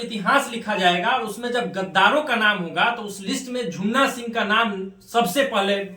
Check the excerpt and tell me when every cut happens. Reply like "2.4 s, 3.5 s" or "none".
none